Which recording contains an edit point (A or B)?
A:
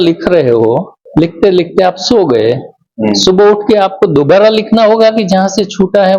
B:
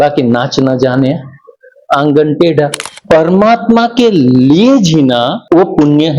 B